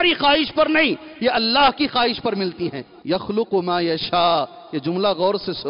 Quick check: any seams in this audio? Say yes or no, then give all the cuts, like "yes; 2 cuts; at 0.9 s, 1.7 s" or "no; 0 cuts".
yes; 1 cut; at 2.9 s